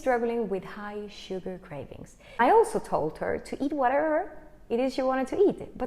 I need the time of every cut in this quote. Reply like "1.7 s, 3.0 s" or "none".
2.4 s